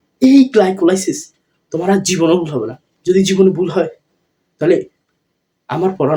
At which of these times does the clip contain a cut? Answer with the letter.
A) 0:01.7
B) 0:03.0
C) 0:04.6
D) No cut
D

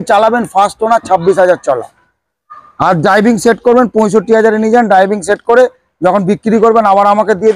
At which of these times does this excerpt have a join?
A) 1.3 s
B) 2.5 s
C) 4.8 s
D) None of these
D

